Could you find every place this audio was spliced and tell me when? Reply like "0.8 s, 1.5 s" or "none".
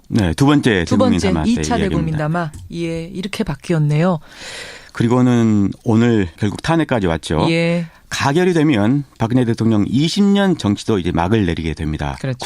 9.0 s